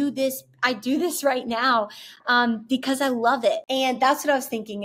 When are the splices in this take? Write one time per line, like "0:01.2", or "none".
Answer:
0:03.6